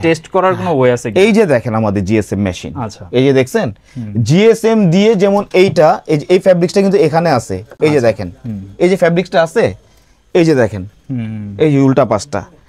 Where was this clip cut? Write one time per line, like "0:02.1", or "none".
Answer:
none